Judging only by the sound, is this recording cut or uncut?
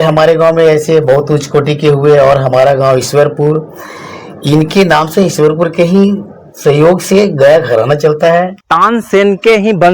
cut